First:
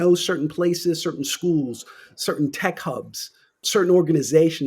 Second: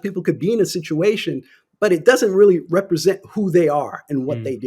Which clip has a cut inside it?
first; 1 cut; at 3.6 s

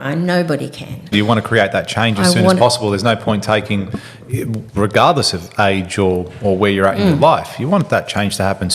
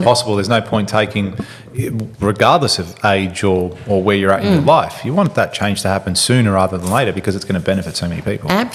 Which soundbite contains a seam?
first; 1 cut; at 1.1 s

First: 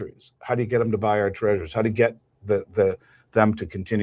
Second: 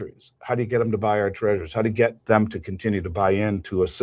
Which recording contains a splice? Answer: second; 1 cut; at 2.2 s

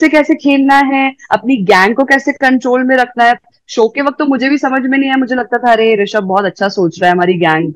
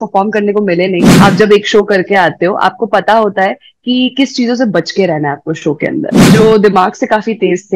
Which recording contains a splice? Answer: second; 2 cuts; at 1.1 s, 6.2 s

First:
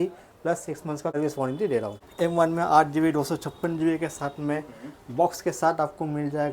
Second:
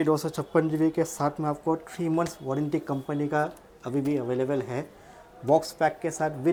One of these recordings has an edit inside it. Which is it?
first; 2 cuts; at 1.1 s, 2.0 s

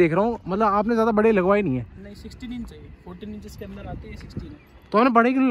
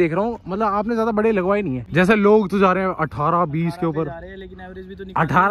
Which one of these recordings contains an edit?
second; 1 cut; at 1.8 s

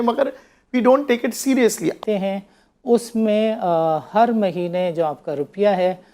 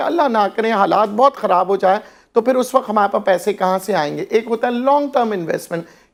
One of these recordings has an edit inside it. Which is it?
first; 1 cut; at 2.0 s

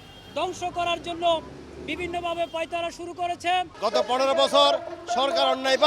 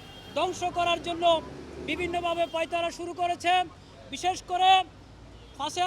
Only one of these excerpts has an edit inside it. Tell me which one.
first; 1 cut; at 3.7 s

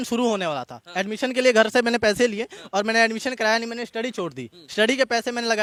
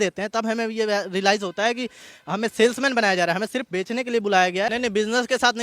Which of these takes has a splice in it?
second; 1 cut; at 4.7 s

